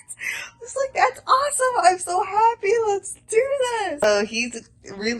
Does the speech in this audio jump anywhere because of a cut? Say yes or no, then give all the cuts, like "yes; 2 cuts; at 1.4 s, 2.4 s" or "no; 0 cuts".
yes; 1 cut; at 4.0 s